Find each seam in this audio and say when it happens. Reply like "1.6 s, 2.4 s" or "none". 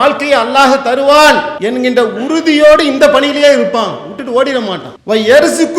1.6 s